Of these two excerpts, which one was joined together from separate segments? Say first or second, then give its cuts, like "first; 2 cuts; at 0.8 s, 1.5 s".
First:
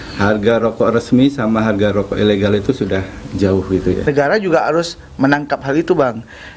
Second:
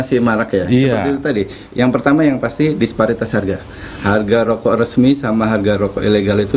first; 1 cut; at 4.0 s